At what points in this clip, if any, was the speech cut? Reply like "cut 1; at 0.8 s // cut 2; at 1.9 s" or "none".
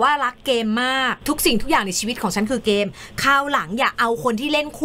cut 1; at 1.1 s